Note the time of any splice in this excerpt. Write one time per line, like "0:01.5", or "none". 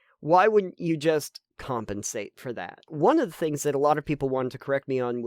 0:02.9